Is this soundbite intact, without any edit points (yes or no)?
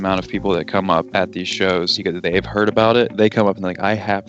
no